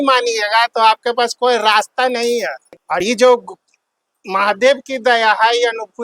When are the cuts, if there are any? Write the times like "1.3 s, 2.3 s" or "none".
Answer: 3.0 s